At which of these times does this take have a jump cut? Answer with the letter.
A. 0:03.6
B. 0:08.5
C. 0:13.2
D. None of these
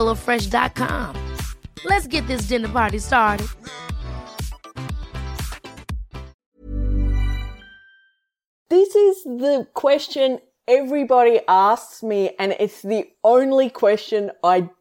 B